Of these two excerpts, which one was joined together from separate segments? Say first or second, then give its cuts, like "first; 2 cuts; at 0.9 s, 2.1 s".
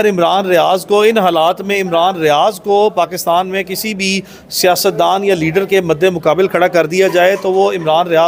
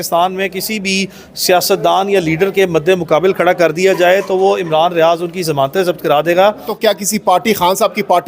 second; 1 cut; at 6.7 s